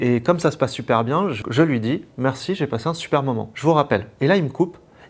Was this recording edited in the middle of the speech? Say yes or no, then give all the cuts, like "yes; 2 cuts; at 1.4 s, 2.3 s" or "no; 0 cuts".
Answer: yes; 1 cut; at 1.4 s